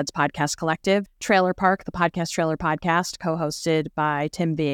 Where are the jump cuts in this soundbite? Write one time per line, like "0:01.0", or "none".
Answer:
0:01.1